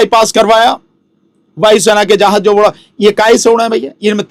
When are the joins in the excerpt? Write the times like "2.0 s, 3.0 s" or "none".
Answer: none